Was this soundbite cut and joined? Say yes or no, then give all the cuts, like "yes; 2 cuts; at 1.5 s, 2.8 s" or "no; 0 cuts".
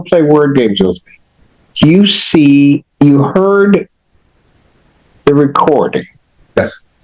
no; 0 cuts